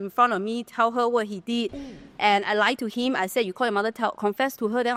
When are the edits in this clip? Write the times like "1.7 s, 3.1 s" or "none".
none

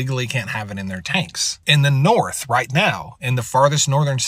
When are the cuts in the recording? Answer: 1.5 s

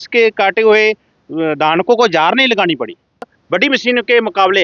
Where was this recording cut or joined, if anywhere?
3.4 s

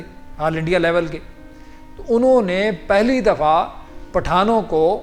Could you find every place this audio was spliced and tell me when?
none

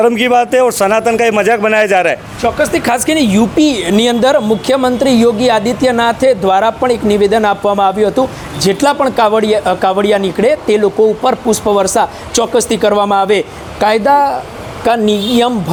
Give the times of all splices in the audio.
none

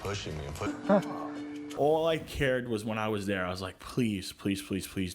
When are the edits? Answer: 1.8 s

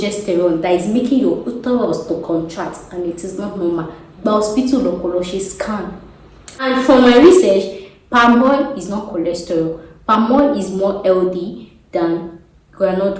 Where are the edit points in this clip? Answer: 6.7 s

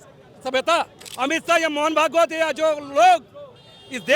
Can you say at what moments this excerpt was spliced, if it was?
1.0 s

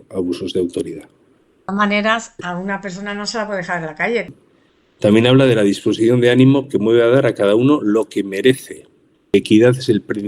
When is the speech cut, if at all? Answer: 1.7 s, 4.4 s, 9.3 s

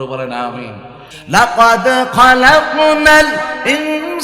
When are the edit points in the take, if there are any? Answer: 1.1 s

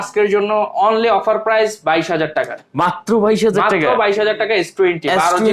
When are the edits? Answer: none

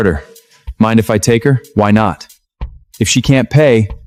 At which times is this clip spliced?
none

